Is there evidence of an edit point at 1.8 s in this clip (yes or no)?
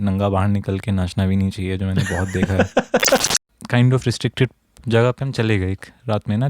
no